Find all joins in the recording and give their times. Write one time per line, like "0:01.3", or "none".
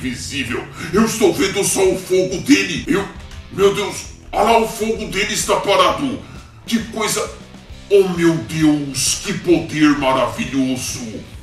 0:02.8